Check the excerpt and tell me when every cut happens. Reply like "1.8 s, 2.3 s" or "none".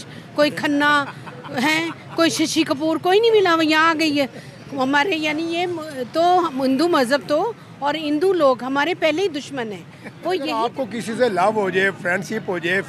10.6 s